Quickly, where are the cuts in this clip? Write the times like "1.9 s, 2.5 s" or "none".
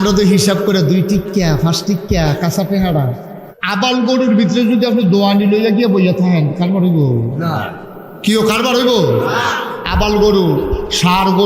3.5 s

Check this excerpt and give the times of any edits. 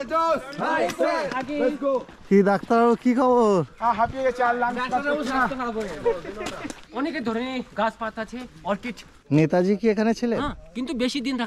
2.1 s, 6.8 s, 9.1 s

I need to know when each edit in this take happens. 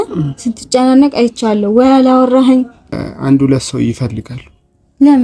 2.9 s

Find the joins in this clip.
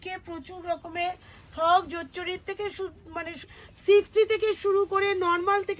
3.6 s

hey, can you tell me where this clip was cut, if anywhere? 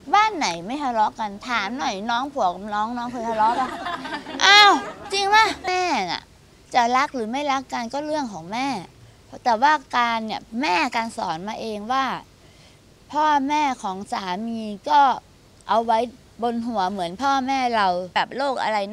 5.7 s, 18.1 s

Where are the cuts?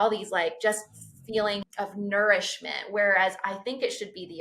1.6 s

